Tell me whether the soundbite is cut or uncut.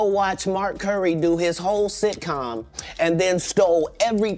uncut